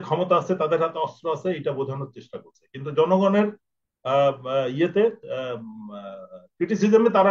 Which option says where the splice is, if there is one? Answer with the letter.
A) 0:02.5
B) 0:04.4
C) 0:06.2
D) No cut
D